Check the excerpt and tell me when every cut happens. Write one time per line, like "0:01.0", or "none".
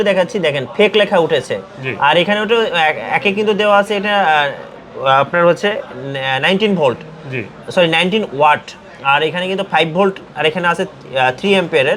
none